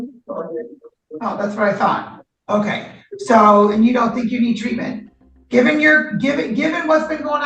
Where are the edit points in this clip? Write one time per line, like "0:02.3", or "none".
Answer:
none